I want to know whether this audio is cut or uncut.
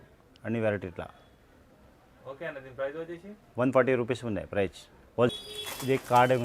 cut